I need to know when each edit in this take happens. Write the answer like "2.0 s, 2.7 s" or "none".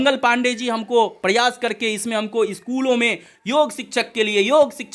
none